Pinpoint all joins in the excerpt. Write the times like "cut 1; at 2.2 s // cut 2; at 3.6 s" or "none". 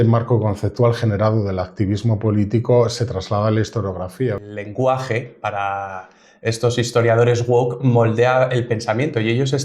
cut 1; at 4.4 s